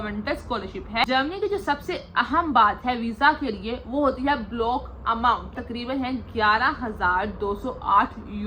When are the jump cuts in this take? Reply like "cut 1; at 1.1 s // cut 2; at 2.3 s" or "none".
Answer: cut 1; at 1.0 s // cut 2; at 5.6 s